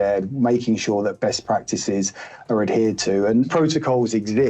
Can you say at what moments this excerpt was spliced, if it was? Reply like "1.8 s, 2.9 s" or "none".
3.5 s